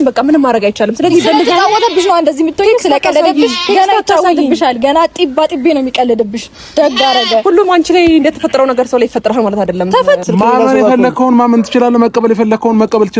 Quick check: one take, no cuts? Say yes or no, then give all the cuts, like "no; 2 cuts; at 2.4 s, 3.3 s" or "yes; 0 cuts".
no; 1 cut; at 10.2 s